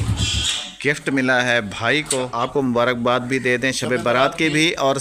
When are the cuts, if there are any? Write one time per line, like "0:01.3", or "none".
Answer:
0:02.5